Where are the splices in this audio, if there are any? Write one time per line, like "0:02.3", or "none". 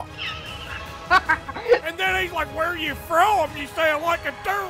0:01.8